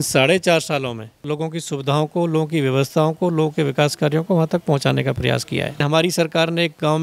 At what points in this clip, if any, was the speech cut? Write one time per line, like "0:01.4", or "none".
0:01.2
0:05.8